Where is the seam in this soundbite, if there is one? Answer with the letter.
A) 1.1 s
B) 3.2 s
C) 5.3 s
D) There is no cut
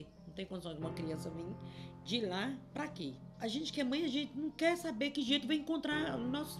B